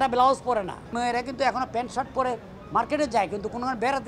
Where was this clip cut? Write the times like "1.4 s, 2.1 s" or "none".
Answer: 0.9 s